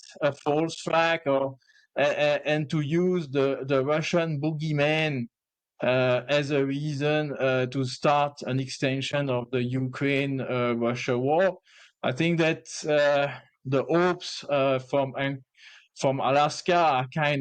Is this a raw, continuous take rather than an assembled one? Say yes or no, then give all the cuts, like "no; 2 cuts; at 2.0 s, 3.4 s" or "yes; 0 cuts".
yes; 0 cuts